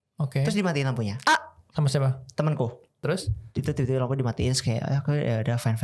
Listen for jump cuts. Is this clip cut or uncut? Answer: cut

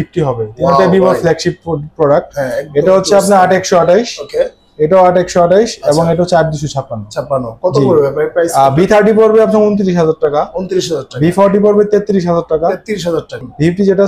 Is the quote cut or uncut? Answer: uncut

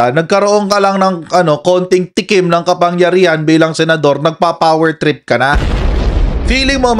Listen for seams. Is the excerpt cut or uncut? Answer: uncut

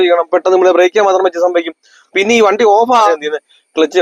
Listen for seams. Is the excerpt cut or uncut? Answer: cut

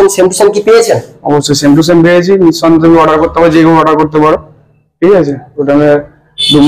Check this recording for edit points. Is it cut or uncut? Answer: uncut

